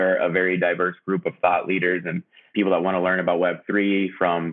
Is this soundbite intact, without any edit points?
yes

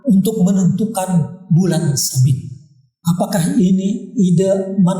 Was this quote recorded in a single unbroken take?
no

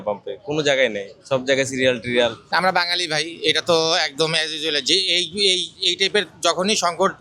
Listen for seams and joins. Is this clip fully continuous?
no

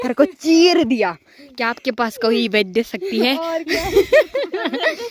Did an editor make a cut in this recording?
no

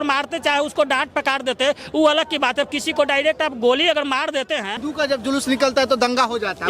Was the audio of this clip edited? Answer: yes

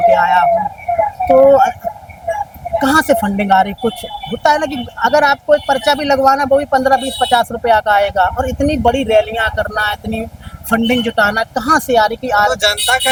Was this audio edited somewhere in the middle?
no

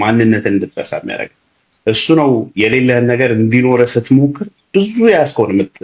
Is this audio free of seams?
yes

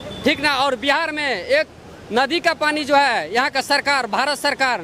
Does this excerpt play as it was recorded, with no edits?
yes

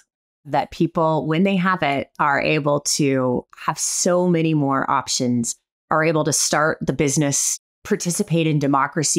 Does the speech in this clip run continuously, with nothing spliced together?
no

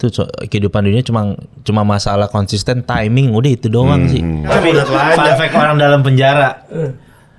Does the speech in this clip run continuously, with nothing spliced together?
no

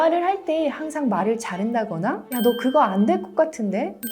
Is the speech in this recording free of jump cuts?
yes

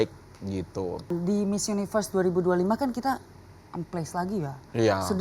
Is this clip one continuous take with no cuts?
no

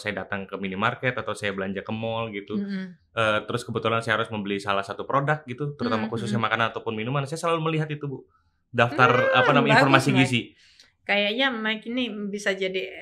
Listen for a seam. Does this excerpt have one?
no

